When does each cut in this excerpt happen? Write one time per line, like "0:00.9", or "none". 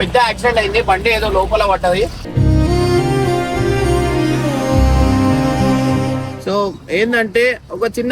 0:06.3